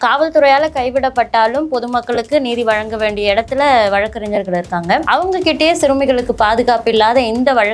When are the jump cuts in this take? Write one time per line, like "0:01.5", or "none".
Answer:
0:05.0